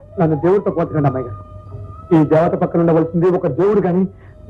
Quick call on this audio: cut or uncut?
uncut